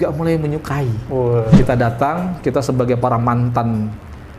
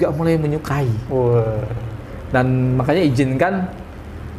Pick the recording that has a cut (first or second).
first